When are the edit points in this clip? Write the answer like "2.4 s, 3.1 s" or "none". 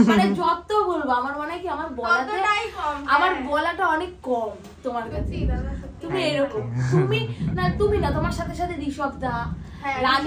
none